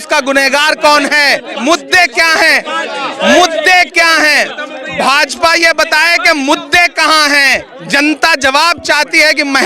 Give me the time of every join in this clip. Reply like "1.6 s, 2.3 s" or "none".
1.6 s